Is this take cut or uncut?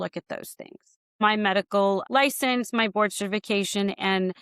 cut